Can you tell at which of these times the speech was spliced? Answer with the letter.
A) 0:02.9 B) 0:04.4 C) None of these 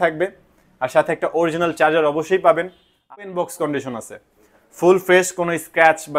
A